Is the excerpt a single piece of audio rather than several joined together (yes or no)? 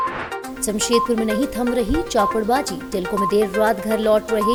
yes